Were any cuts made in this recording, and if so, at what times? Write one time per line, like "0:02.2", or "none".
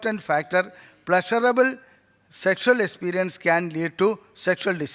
none